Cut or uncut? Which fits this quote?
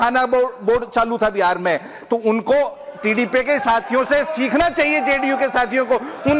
uncut